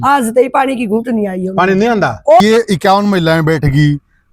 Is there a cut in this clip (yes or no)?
yes